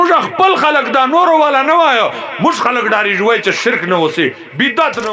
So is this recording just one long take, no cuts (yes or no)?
yes